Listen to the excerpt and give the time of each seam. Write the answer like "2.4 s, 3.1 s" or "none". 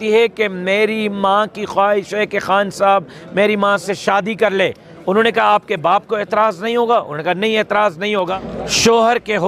8.3 s

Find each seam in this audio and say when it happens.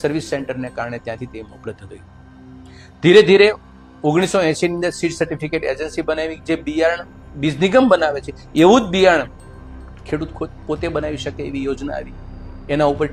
none

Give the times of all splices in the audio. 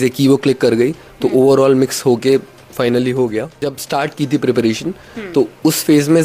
3.5 s

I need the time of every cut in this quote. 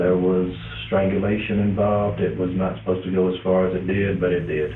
2.2 s

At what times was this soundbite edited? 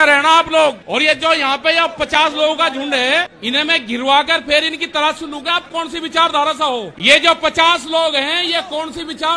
0.8 s, 3.4 s, 6.9 s

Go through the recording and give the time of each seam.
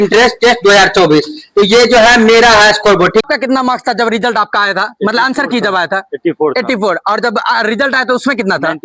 3.2 s

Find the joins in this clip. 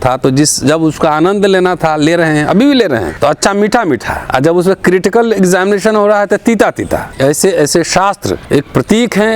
3.1 s, 4.1 s, 7.0 s, 8.3 s

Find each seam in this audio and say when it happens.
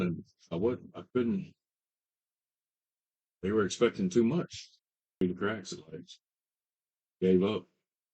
5.2 s

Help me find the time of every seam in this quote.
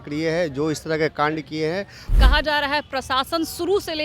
2.2 s

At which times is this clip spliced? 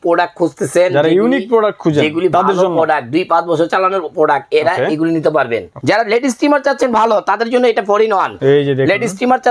5.7 s, 8.3 s

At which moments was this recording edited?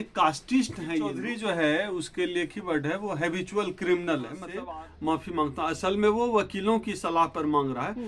1.2 s, 4.5 s

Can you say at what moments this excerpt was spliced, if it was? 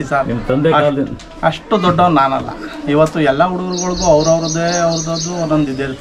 none

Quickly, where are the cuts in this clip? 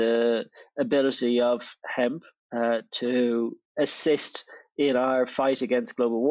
3.6 s

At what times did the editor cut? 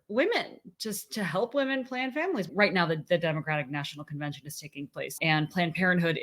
2.5 s, 5.1 s

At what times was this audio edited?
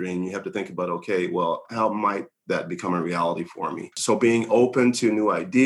3.9 s

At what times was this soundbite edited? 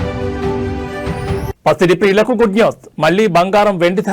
none

